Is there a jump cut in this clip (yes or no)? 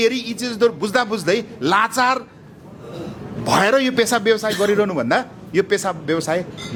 no